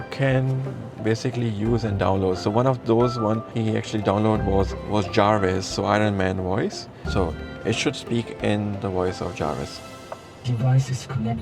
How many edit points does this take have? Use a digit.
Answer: 3